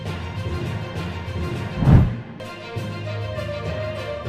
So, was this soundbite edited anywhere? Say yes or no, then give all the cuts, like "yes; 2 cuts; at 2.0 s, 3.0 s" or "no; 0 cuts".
no; 0 cuts